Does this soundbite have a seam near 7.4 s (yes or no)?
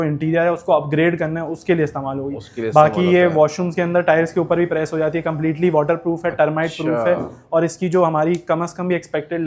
no